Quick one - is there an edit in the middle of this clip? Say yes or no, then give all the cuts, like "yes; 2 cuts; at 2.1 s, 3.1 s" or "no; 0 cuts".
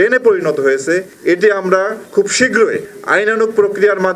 yes; 1 cut; at 2.9 s